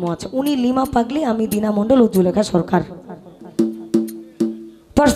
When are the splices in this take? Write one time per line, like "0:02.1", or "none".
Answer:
none